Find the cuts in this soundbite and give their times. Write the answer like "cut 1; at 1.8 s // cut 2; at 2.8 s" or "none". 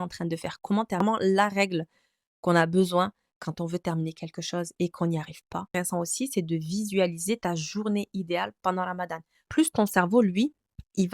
cut 1; at 1.0 s // cut 2; at 5.8 s // cut 3; at 9.5 s